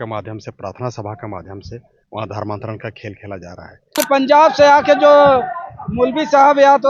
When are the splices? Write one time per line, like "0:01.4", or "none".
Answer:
0:04.0